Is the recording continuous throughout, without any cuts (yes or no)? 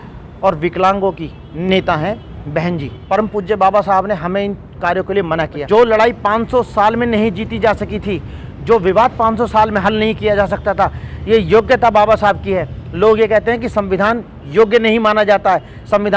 no